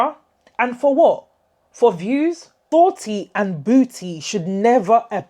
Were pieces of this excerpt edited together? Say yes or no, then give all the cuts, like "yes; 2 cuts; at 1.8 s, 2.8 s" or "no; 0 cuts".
yes; 1 cut; at 2.5 s